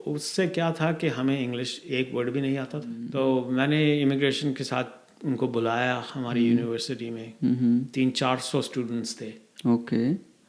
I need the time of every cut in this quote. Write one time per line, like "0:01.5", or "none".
0:03.0